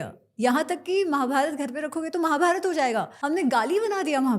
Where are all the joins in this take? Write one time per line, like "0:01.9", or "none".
0:03.1